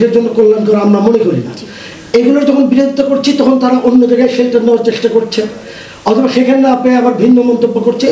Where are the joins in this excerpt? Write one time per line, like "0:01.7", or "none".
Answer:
none